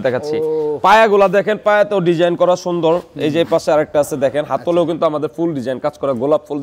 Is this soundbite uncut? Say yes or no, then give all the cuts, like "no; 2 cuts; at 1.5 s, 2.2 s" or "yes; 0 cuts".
yes; 0 cuts